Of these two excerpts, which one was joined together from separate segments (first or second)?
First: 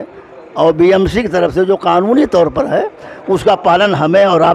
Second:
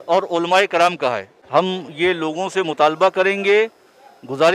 second